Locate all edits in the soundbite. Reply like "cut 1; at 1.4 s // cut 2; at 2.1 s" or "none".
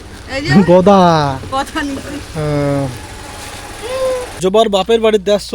cut 1; at 4.3 s